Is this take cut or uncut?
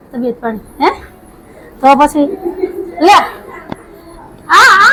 uncut